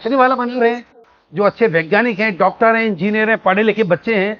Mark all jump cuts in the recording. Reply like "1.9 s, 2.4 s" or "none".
none